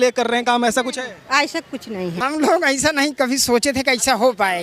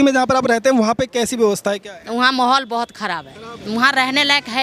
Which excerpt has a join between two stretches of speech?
first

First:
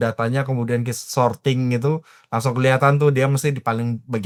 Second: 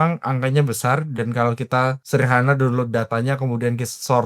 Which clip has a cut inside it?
second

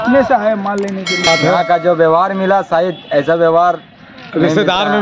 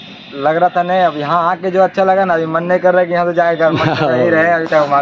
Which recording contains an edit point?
first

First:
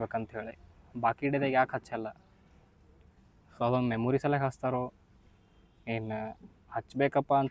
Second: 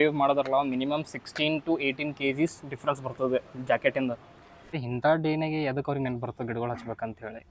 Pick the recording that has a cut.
second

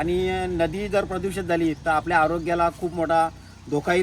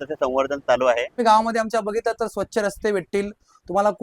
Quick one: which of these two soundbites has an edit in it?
second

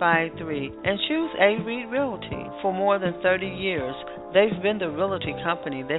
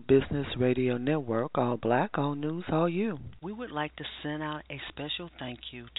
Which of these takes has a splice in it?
second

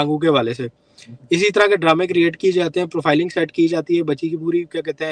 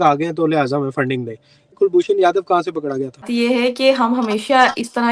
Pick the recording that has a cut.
second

